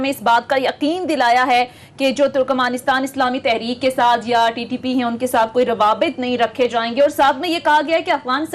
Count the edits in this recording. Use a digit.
0